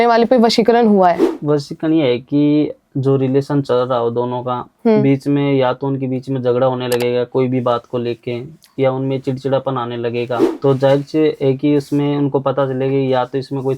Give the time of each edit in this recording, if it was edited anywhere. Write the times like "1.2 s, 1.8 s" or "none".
10.5 s